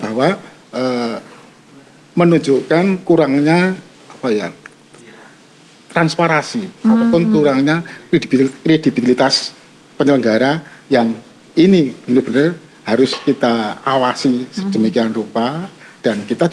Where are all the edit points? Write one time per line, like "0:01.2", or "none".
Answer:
none